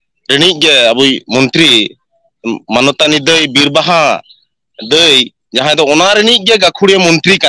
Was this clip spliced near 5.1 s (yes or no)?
no